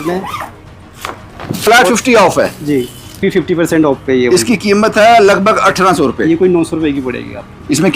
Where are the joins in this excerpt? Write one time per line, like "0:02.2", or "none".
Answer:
0:01.6
0:03.2